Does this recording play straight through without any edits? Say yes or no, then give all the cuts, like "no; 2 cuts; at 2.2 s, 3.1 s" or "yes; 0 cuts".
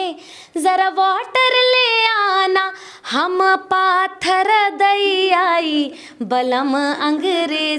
yes; 0 cuts